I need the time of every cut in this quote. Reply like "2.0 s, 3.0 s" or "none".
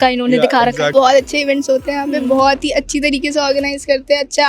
0.9 s